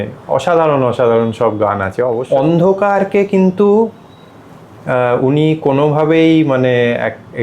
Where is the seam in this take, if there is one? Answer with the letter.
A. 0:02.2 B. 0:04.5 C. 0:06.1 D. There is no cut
A